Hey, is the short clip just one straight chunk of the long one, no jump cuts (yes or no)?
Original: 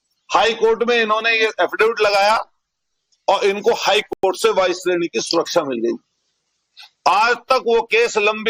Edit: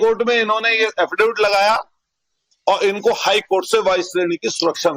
no